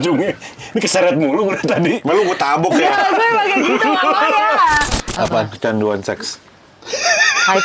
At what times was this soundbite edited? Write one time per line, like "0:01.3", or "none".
0:05.0